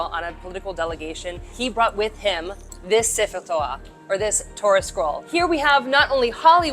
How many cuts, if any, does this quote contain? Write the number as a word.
one